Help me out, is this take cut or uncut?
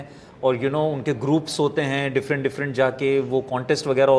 uncut